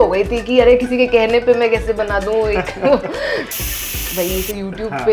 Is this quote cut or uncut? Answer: cut